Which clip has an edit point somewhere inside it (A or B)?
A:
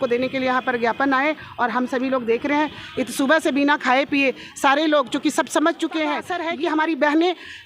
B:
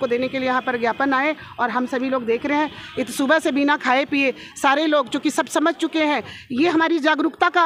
A